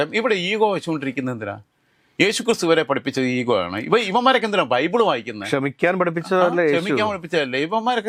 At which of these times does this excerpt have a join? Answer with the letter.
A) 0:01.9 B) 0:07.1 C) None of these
C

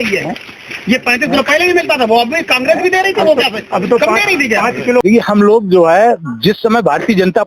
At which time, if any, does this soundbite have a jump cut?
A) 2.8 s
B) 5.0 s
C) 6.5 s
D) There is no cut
B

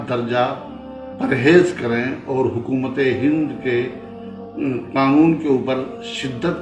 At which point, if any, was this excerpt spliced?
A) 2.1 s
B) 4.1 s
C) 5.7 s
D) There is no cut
D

